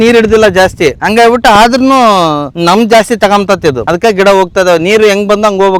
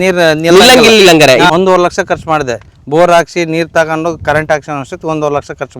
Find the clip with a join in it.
second; 1 cut; at 1.5 s

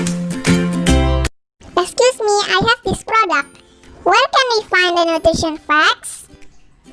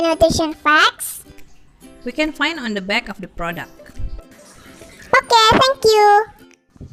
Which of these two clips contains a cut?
first; 1 cut; at 1.3 s

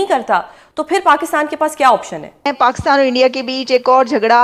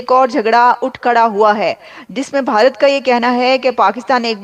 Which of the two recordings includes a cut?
first; 1 cut; at 2.5 s

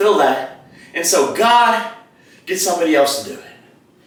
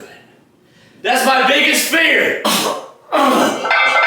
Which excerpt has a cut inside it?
second; 1 cut; at 2.4 s

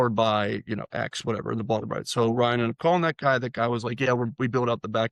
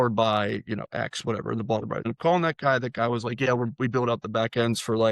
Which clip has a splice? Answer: second; 1 cut; at 2.1 s

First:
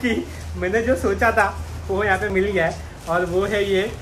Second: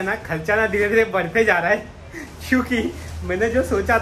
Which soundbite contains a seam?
first; 1 cut; at 2.3 s

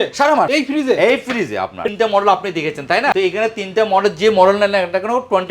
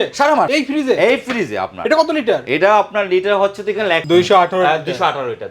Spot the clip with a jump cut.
first; 1 cut; at 1.9 s

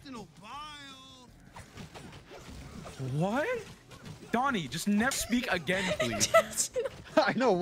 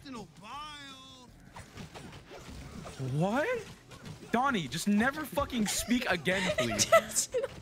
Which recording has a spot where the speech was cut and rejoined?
first; 1 cut; at 5.2 s

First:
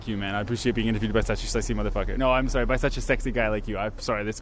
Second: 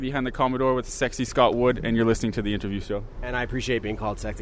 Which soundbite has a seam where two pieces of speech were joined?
second; 1 cut; at 3.2 s

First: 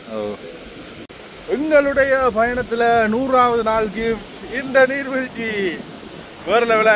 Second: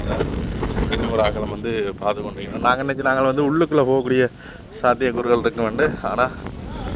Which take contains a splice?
first; 1 cut; at 1.1 s

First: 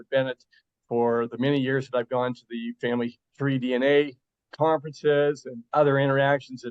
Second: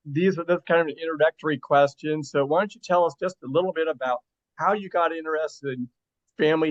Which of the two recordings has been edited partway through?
first; 1 cut; at 3.2 s

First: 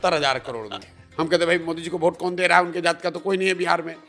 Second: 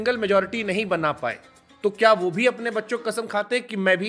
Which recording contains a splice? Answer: first; 1 cut; at 1.0 s

